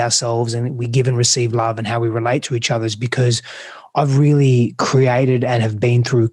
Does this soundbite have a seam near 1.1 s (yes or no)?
no